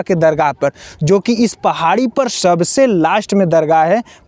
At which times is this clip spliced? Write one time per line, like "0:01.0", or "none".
none